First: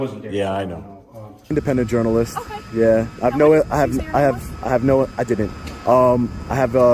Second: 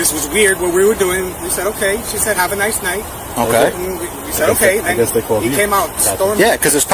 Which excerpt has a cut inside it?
first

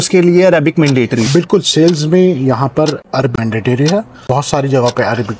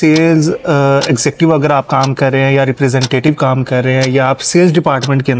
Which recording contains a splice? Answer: first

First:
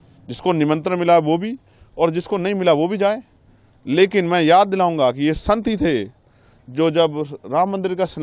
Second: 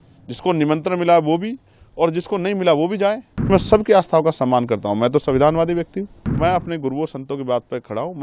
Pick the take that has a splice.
second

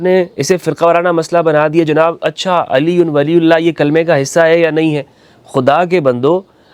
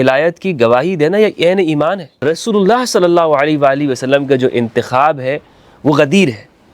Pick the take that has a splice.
second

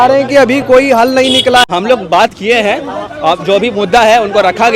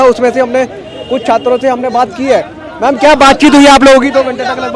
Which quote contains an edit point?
first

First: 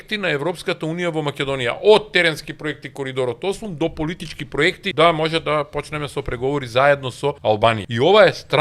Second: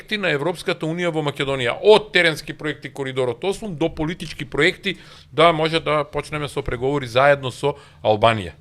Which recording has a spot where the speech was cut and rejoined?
first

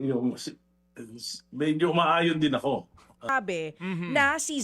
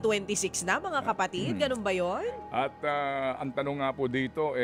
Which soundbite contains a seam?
first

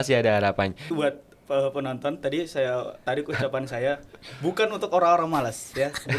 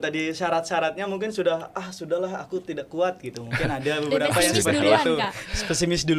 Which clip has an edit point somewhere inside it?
first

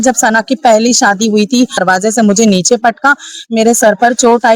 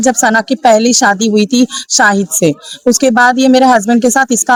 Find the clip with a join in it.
first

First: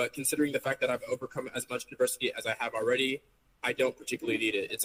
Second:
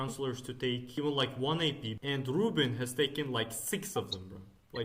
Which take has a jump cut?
second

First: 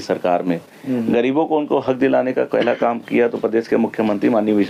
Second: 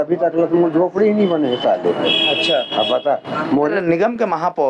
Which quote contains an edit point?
second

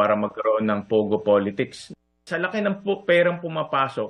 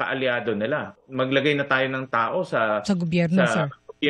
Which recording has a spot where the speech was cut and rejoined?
second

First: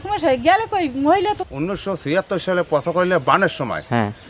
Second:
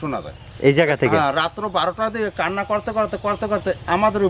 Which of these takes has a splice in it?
first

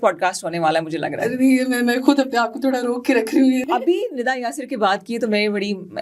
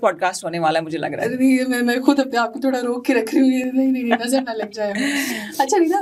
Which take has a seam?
first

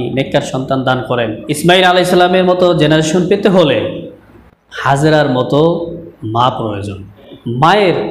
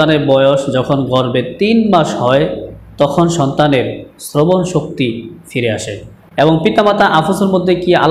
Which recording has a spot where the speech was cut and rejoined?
first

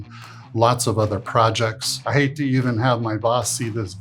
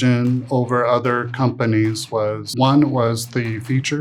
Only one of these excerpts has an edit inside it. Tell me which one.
first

